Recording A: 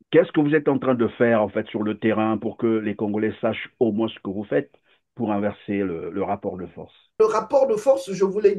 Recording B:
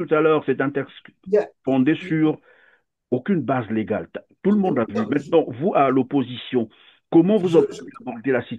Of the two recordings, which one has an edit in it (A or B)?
A